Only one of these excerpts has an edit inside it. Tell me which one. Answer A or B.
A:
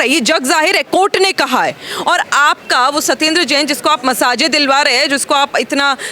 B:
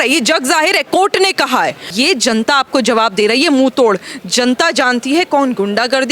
B